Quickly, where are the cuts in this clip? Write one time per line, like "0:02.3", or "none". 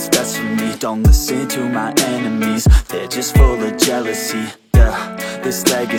none